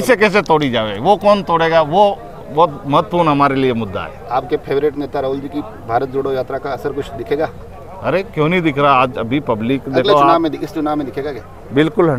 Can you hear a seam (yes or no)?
no